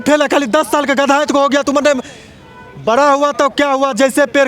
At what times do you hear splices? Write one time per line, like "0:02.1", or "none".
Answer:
none